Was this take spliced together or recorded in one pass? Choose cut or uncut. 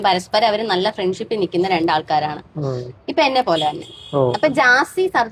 uncut